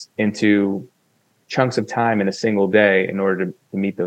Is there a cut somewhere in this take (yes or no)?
no